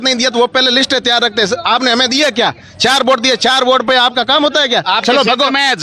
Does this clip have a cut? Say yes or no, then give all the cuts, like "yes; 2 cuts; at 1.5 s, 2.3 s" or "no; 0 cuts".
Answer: no; 0 cuts